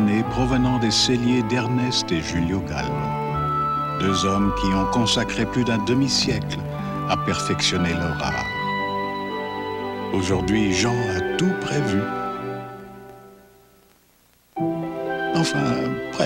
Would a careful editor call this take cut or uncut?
uncut